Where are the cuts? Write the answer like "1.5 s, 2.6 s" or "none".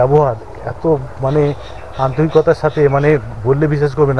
none